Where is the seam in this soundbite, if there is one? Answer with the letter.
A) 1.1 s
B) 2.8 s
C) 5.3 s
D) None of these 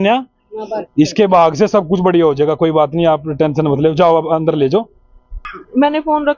C